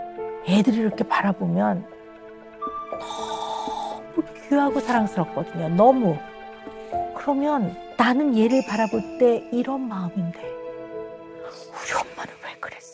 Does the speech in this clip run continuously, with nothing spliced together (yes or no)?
yes